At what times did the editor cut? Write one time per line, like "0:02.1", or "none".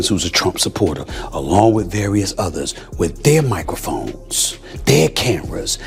none